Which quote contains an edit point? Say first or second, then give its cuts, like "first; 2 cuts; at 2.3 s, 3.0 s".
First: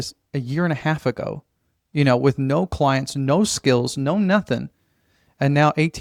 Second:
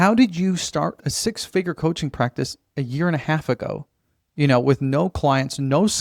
second; 1 cut; at 0.9 s